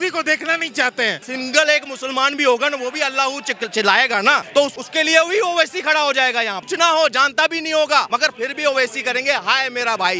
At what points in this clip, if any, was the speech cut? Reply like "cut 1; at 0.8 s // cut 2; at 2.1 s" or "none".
cut 1; at 1.2 s // cut 2; at 4.6 s // cut 3; at 6.6 s // cut 4; at 8.1 s

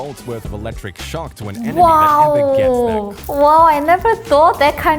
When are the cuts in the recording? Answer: cut 1; at 1.5 s // cut 2; at 3.2 s

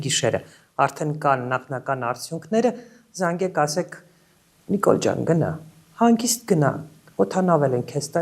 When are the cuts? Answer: none

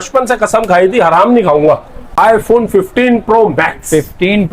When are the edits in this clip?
cut 1; at 2.0 s

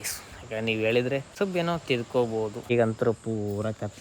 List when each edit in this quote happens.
cut 1; at 1.3 s // cut 2; at 2.7 s

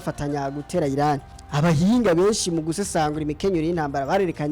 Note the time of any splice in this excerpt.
cut 1; at 1.4 s

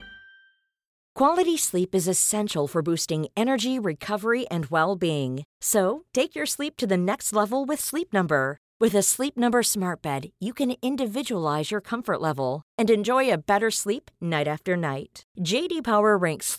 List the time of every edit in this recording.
none

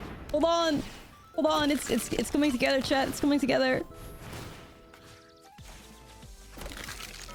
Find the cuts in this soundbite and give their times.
none

